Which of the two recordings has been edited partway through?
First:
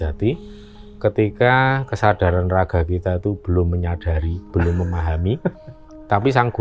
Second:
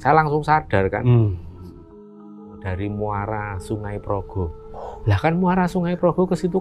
second; 1 cut; at 2.3 s

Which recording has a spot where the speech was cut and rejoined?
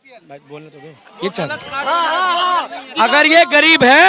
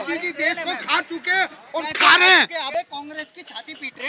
second; 1 cut; at 2.6 s

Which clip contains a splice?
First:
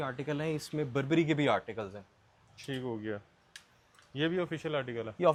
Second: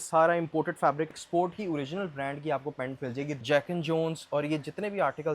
second; 2 cuts; at 1.1 s, 3.4 s

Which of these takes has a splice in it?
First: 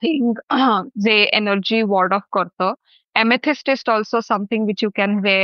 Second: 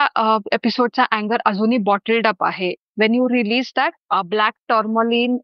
second; 1 cut; at 4.0 s

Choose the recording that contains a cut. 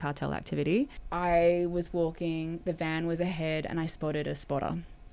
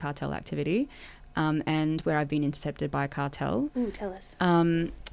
first; 1 cut; at 1.0 s

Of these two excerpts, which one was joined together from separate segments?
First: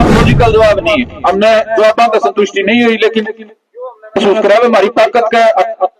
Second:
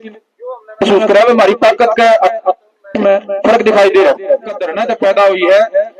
second; 1 cut; at 4.7 s

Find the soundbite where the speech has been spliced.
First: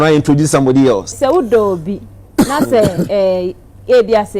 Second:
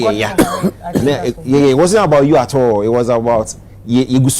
first; 1 cut; at 1.1 s

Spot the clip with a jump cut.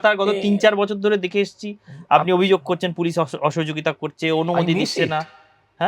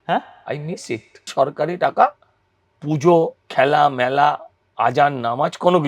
second; 2 cuts; at 1.3 s, 3.4 s

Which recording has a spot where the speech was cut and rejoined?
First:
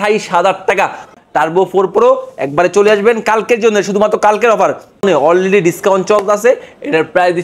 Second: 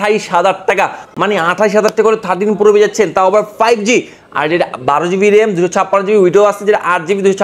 first; 2 cuts; at 1.1 s, 5.0 s

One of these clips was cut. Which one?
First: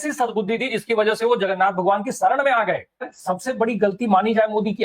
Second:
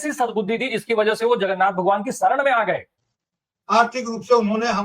first; 1 cut; at 3.1 s

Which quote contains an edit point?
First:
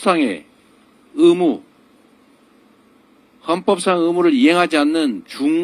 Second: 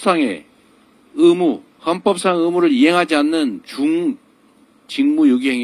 second; 1 cut; at 1.7 s

